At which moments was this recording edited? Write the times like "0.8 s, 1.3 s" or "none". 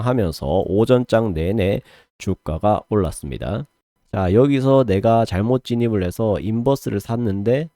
4.0 s